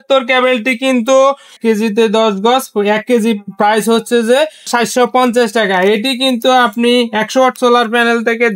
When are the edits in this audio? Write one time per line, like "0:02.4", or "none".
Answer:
none